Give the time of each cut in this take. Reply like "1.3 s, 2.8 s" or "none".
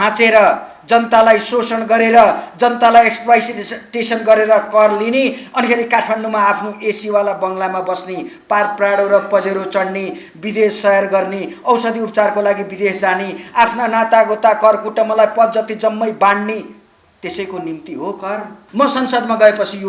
18.6 s